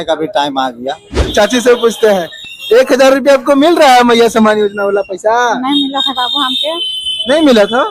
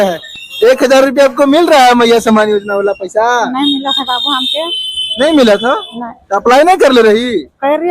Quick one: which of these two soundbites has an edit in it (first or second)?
first